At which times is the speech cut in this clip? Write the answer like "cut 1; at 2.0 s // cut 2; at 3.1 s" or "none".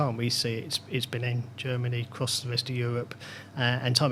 none